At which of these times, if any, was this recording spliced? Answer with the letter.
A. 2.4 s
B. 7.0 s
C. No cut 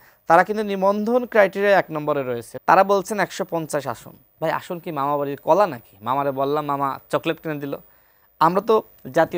A